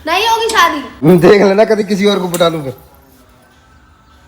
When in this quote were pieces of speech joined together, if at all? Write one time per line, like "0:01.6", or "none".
0:00.9